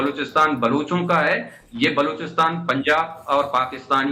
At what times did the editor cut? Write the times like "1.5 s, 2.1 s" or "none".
none